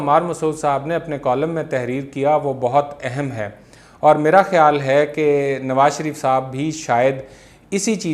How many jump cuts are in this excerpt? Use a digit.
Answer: 0